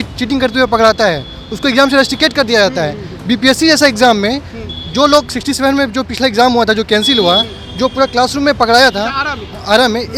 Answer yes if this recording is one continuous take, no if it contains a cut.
yes